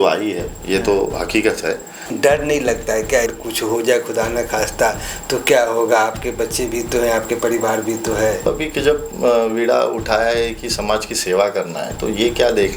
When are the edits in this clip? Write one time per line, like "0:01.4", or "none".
0:02.1
0:03.4
0:08.5